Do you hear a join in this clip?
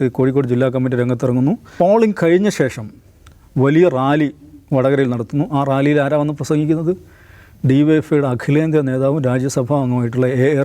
yes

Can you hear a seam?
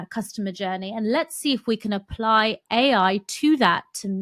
no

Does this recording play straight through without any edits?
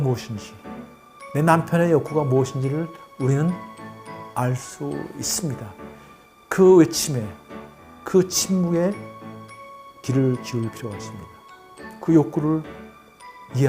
yes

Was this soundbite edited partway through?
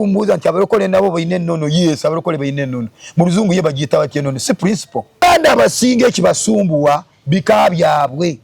yes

